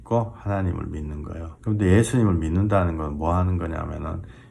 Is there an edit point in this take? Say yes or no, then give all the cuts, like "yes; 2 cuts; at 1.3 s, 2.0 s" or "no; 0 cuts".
yes; 1 cut; at 1.5 s